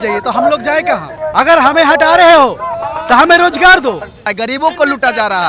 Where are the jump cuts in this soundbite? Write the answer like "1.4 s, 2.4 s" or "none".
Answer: 1.1 s, 4.3 s